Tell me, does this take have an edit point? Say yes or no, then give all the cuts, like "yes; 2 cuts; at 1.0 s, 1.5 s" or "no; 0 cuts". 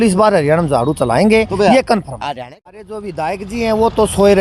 yes; 1 cut; at 2.4 s